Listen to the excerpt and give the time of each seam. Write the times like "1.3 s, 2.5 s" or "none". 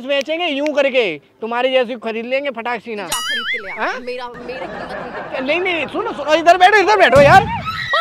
none